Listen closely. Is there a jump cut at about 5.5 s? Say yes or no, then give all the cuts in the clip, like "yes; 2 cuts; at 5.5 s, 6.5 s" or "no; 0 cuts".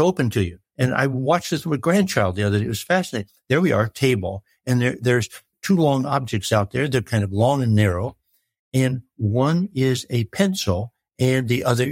yes; 1 cut; at 5.5 s